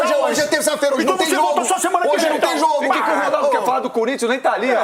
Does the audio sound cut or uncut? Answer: uncut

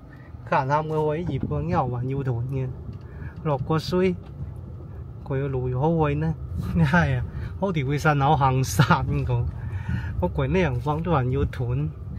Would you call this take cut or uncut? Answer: cut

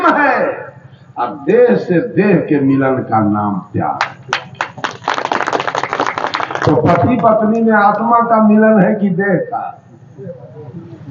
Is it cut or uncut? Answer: uncut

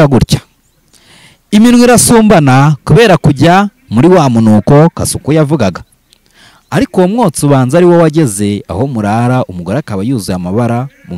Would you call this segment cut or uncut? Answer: uncut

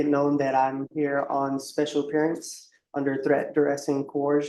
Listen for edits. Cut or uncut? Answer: uncut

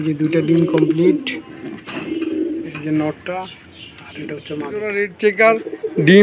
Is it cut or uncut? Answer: cut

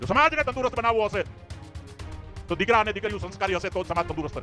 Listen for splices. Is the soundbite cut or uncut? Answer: uncut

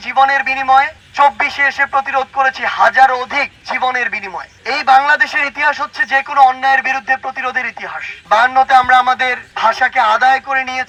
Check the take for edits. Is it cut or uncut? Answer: uncut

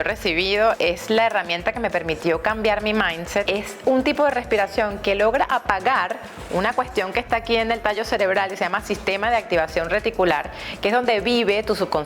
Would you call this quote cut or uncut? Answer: cut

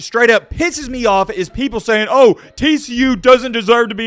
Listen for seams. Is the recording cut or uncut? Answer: uncut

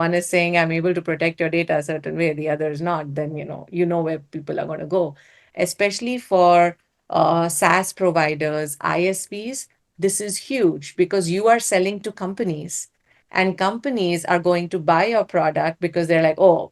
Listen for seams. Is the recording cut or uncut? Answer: uncut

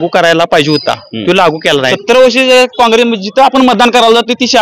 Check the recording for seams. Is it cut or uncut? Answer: cut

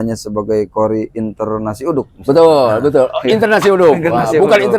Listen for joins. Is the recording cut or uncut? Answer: uncut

